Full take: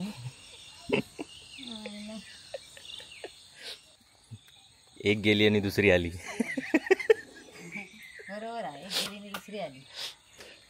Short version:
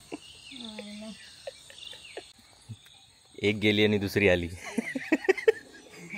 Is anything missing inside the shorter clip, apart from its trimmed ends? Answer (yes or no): yes